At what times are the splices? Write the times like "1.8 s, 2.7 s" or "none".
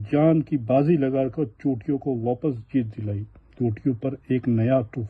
3.5 s